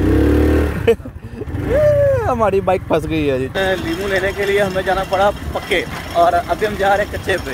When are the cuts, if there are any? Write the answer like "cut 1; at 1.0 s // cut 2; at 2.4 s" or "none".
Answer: cut 1; at 3.5 s // cut 2; at 6.0 s